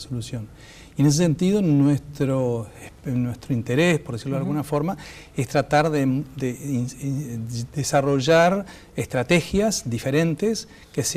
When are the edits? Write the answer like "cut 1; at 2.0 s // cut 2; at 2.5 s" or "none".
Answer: cut 1; at 4.9 s

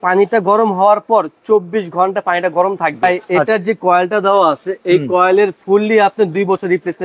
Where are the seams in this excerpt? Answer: cut 1; at 3.2 s

